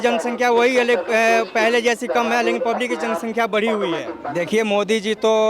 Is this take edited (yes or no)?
yes